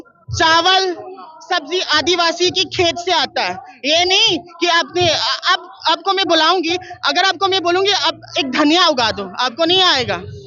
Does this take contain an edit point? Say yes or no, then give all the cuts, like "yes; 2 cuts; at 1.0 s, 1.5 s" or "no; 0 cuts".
no; 0 cuts